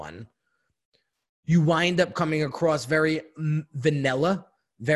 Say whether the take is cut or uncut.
uncut